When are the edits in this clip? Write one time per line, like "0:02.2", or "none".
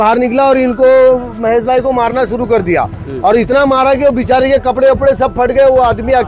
none